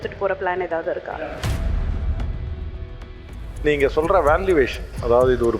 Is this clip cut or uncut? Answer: cut